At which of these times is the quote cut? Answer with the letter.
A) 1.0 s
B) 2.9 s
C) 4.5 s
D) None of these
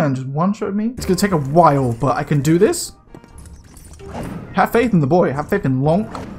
A